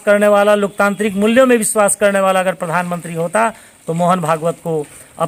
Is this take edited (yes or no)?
no